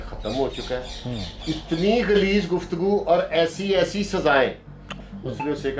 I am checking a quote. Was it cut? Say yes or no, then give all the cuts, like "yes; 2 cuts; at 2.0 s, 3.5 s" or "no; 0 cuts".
yes; 1 cut; at 4.8 s